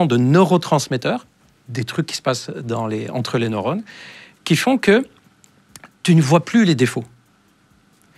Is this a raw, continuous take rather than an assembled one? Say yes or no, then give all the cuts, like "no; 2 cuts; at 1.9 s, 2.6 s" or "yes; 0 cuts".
yes; 0 cuts